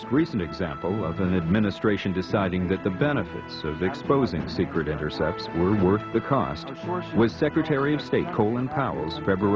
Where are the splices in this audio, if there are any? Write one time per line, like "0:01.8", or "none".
0:04.4